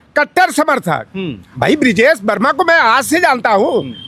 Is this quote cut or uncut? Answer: cut